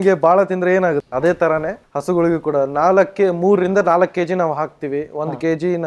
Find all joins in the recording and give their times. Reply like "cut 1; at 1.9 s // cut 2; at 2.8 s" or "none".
none